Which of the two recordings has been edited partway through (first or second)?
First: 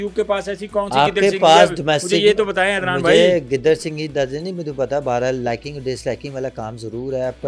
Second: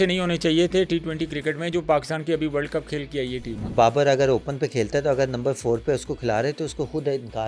second